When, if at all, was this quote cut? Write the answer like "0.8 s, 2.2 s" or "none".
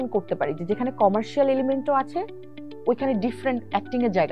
none

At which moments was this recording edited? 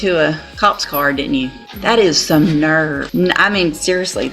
1.7 s, 3.0 s

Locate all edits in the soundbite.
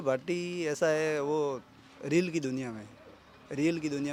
none

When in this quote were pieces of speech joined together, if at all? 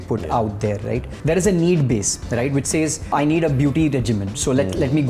1.1 s, 3.1 s

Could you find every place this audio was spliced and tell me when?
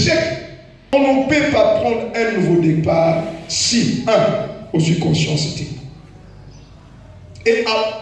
0.9 s

